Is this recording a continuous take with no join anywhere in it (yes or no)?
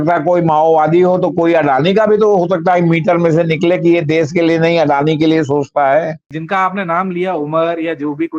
no